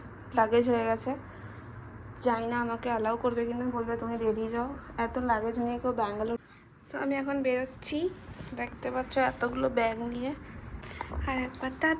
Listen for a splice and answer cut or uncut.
cut